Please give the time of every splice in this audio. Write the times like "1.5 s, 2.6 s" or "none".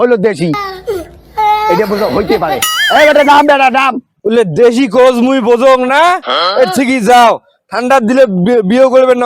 none